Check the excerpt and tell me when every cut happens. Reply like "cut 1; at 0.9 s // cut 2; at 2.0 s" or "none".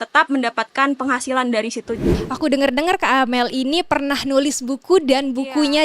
cut 1; at 2.0 s